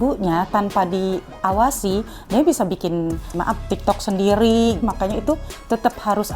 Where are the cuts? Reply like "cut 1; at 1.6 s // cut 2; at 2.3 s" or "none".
cut 1; at 3.3 s // cut 2; at 4.8 s

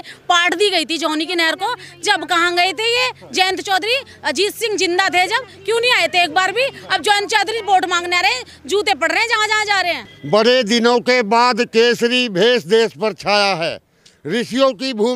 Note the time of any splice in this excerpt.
cut 1; at 10.1 s

